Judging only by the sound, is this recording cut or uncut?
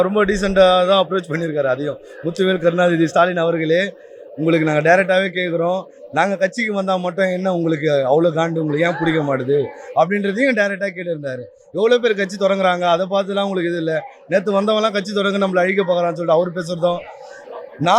uncut